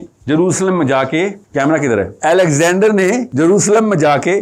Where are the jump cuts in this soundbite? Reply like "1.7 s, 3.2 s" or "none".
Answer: 1.4 s, 2.1 s, 3.3 s